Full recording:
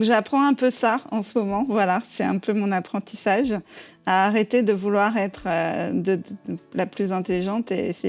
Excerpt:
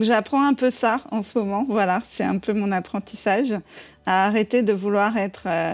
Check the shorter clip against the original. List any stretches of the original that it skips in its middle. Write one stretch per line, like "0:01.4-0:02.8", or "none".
none